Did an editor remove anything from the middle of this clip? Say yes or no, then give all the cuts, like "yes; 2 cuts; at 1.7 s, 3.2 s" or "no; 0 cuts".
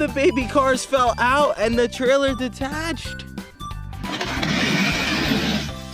no; 0 cuts